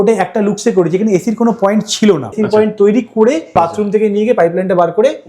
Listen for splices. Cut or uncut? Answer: cut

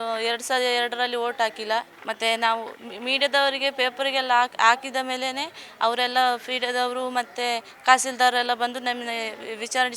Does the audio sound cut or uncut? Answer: cut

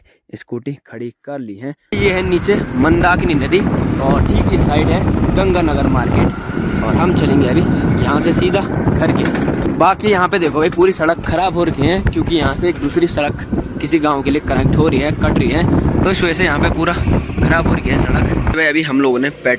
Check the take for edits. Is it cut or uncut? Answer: cut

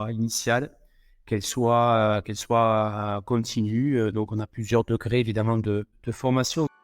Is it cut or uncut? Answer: cut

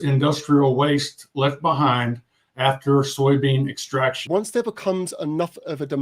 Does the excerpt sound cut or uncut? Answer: cut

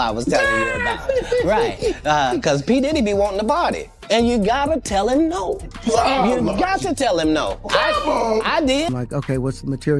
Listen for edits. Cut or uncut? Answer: cut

